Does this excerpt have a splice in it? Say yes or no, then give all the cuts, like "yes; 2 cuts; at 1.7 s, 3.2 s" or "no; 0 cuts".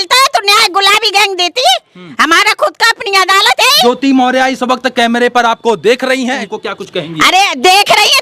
yes; 2 cuts; at 3.8 s, 6.4 s